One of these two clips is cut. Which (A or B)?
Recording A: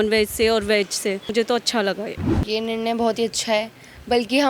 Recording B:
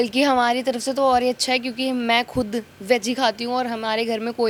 A